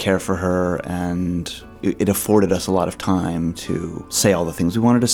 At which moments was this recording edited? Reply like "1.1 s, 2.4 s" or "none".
1.6 s, 4.1 s